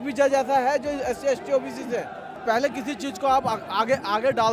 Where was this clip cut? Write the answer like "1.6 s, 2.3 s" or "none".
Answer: 2.4 s